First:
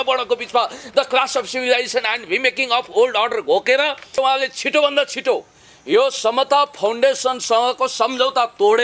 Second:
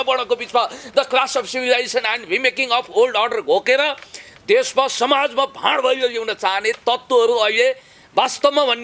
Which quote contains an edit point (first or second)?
first